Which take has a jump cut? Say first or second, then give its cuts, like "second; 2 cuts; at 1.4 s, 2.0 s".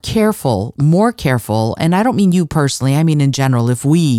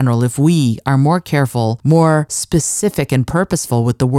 second; 2 cuts; at 1.8 s, 2.4 s